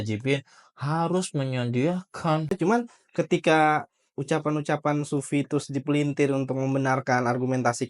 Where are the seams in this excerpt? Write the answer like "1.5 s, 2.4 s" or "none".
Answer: 2.5 s